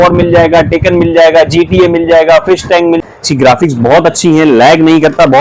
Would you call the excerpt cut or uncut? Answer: cut